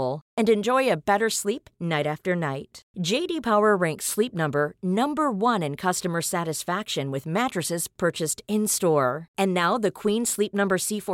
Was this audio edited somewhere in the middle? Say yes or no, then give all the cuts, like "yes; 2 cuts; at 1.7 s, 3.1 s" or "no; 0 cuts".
no; 0 cuts